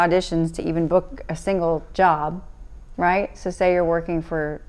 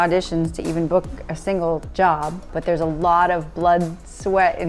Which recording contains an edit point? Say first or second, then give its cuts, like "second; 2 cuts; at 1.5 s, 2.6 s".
second; 1 cut; at 2.5 s